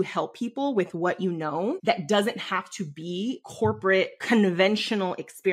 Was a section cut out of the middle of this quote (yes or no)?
yes